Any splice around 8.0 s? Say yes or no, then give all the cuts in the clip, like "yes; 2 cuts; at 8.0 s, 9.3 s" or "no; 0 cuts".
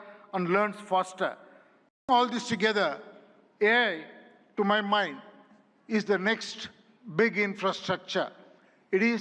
no; 1 cut; at 2.1 s